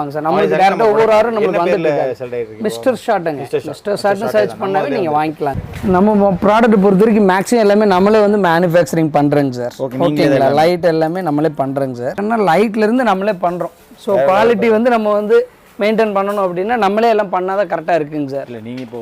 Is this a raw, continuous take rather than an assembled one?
no; 2 cuts; at 5.6 s, 12.2 s

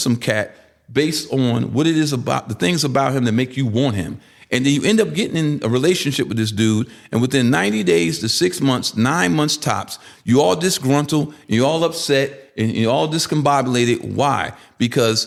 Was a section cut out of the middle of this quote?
no; 0 cuts

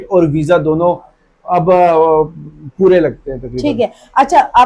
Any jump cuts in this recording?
no; 0 cuts

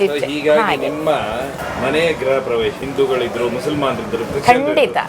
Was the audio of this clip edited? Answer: no; 0 cuts

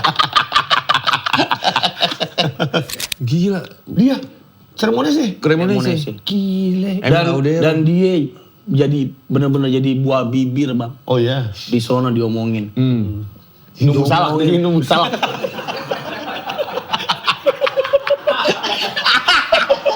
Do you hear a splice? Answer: yes; 1 cut; at 2.9 s

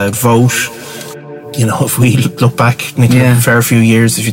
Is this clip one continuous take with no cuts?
no; 1 cut; at 1.1 s

